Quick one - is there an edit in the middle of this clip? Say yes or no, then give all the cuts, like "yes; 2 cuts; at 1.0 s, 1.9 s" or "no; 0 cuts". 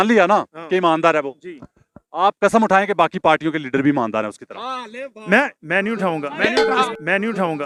no; 0 cuts